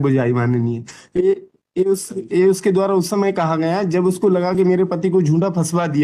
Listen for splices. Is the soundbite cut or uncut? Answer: uncut